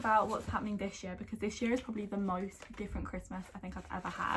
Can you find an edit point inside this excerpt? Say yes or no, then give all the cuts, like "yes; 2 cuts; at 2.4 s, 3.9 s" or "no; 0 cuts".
no; 0 cuts